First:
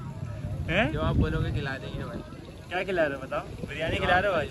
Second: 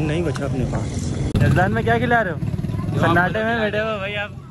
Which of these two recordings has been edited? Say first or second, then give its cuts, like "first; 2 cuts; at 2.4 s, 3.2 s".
second; 1 cut; at 1.4 s